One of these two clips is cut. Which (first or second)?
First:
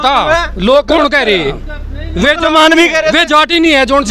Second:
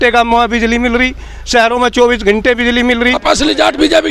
second